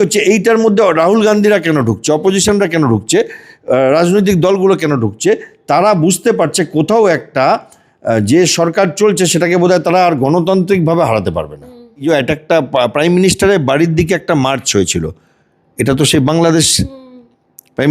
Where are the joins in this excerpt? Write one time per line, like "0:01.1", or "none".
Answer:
0:12.0